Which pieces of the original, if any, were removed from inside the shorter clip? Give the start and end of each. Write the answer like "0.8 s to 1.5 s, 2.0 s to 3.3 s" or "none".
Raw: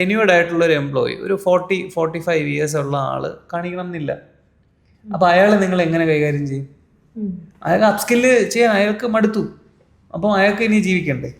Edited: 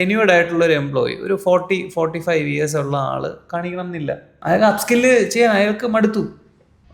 4.3 s to 7.5 s